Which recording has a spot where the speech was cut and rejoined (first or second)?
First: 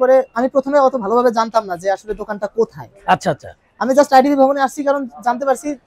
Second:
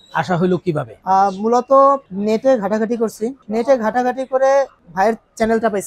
second